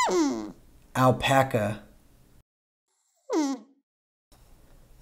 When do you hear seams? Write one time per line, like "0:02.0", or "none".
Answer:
none